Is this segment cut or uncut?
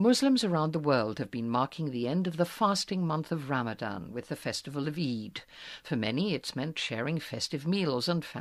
uncut